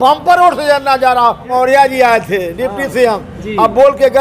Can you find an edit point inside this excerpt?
yes; 1 cut; at 1.5 s

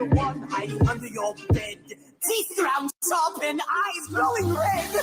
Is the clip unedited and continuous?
yes; 0 cuts

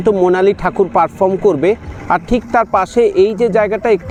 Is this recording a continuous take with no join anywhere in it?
yes; 0 cuts

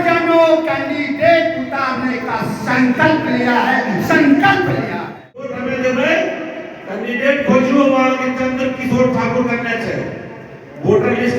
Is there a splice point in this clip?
yes; 1 cut; at 5.6 s

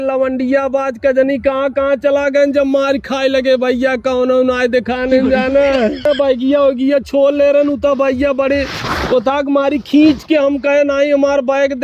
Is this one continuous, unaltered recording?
no; 1 cut; at 6.1 s

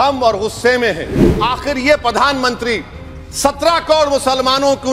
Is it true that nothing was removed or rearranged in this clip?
no; 1 cut; at 1.3 s

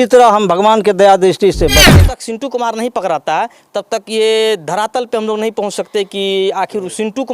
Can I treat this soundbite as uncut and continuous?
no; 1 cut; at 1.9 s

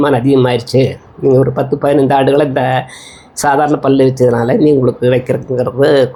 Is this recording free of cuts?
yes; 0 cuts

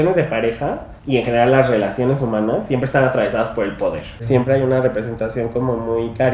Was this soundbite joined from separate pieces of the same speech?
yes; 2 cuts; at 0.9 s, 4.2 s

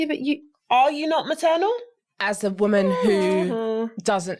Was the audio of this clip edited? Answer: no; 0 cuts

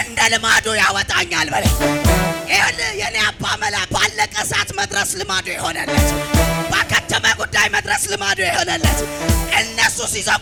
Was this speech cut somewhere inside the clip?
no; 0 cuts

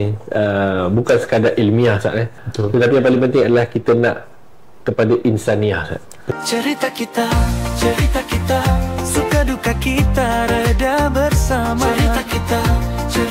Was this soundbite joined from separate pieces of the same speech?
yes; 2 cuts; at 2.4 s, 6.3 s

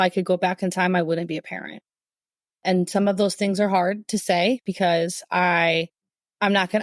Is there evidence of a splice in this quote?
no; 0 cuts

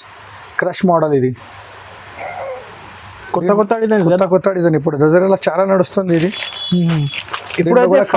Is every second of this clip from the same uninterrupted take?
yes; 0 cuts

